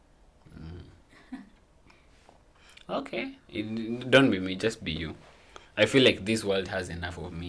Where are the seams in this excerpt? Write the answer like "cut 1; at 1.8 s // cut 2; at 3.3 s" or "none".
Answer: none

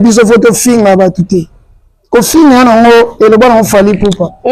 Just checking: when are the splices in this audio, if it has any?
none

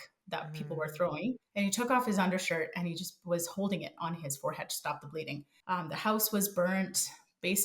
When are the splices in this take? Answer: cut 1; at 1.5 s // cut 2; at 5.5 s

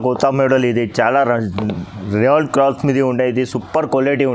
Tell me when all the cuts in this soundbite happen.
none

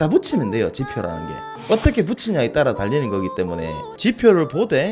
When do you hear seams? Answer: cut 1; at 3.9 s

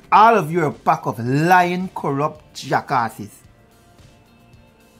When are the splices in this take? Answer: none

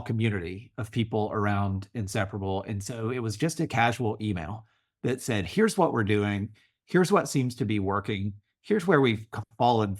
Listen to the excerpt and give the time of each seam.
none

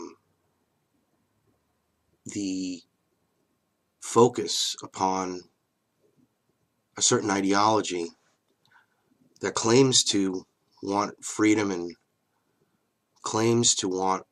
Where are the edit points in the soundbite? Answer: cut 1; at 11.9 s

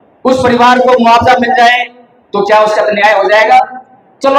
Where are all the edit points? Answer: none

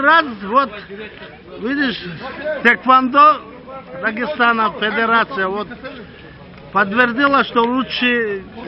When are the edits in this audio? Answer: none

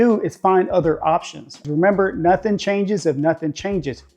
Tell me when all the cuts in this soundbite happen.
cut 1; at 1.6 s

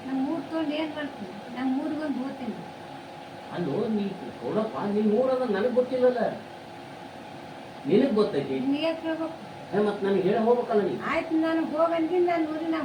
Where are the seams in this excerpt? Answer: none

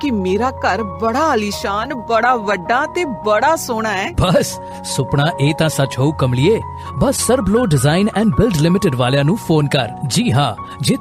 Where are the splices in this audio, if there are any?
none

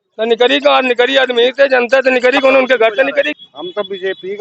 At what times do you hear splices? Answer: cut 1; at 3.3 s

